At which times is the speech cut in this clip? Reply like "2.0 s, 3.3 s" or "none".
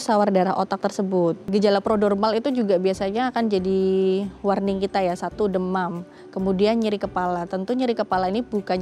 1.4 s